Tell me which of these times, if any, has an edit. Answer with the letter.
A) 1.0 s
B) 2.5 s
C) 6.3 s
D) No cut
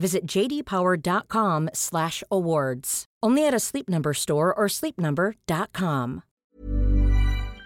C